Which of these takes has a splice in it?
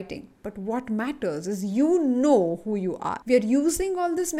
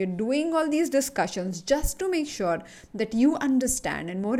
first; 1 cut; at 3.1 s

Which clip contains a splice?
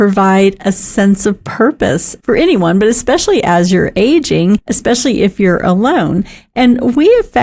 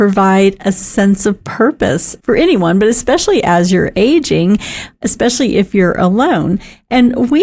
first; 1 cut; at 4.7 s

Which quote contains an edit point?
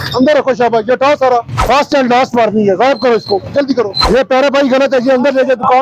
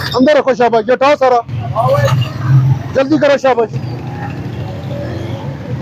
first; 2 cuts; at 1.5 s, 4.0 s

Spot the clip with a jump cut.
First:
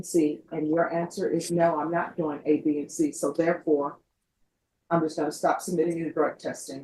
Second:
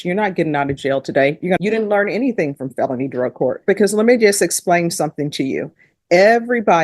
second; 1 cut; at 1.6 s

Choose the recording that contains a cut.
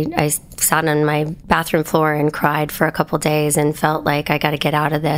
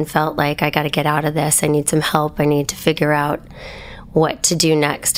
first; 1 cut; at 1.4 s

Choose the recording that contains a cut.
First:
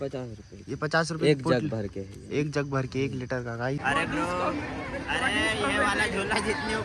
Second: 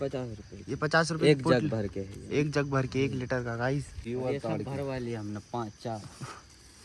first; 1 cut; at 3.8 s

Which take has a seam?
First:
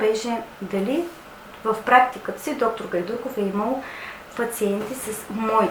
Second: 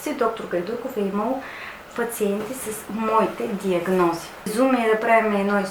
second; 1 cut; at 4.5 s

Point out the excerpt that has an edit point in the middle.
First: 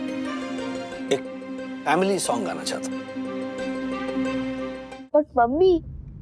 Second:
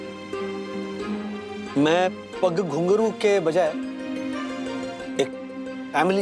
first; 1 cut; at 4.8 s

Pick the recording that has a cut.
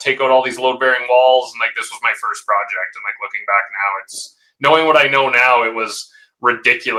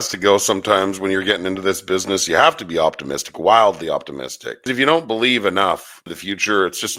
second; 2 cuts; at 4.7 s, 6.2 s

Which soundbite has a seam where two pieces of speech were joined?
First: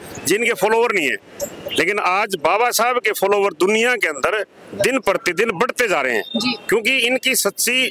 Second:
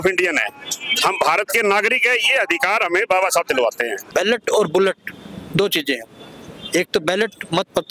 second; 1 cut; at 4.0 s

